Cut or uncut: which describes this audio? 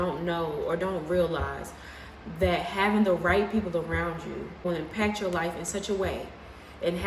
cut